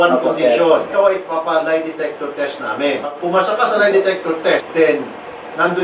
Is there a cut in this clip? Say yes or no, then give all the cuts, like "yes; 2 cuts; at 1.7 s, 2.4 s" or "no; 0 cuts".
yes; 3 cuts; at 0.9 s, 3.2 s, 4.7 s